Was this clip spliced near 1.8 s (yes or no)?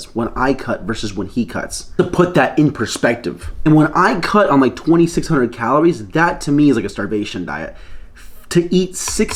no